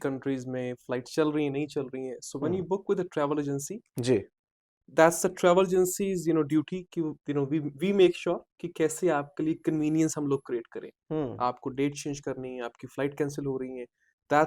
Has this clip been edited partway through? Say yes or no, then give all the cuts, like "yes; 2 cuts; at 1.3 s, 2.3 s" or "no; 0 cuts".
no; 0 cuts